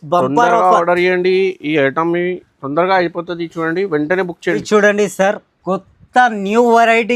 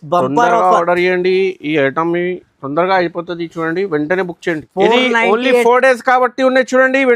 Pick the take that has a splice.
second; 1 cut; at 4.6 s

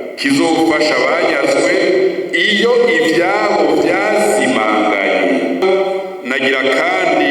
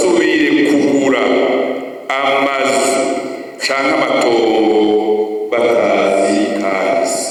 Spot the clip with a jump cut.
first; 1 cut; at 5.6 s

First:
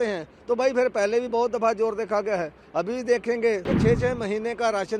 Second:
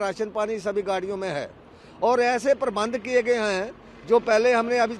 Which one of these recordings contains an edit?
first; 1 cut; at 3.7 s

